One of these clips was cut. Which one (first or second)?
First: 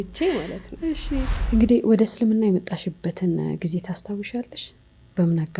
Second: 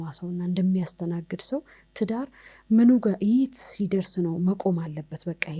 first